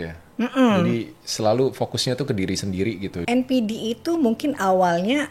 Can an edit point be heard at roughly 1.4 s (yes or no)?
no